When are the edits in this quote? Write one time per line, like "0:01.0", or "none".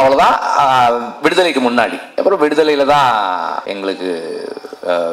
0:02.1
0:03.6